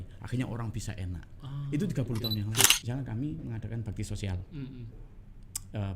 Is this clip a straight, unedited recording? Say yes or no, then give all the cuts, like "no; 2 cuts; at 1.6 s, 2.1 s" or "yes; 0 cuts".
no; 1 cut; at 2.7 s